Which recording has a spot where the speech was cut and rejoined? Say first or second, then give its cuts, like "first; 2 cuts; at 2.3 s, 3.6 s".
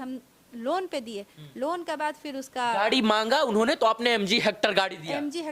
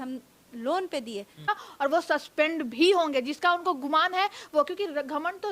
second; 1 cut; at 1.5 s